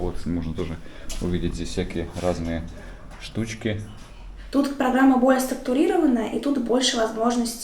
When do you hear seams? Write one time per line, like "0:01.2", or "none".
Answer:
0:04.1